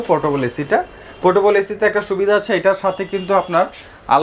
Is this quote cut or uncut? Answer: uncut